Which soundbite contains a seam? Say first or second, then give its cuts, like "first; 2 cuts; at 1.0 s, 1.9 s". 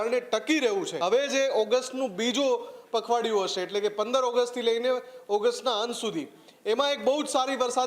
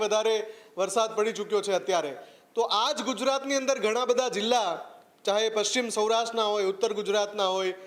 first; 1 cut; at 0.9 s